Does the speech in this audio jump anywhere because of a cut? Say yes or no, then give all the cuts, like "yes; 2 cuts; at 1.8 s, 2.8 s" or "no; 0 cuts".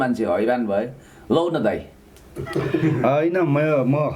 no; 0 cuts